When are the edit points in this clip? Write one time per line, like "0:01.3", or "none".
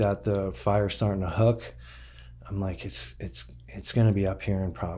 none